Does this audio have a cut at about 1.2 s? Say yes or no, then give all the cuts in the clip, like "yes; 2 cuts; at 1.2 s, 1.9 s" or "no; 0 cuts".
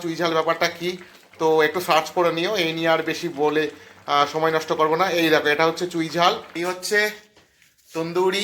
no; 1 cut; at 6.5 s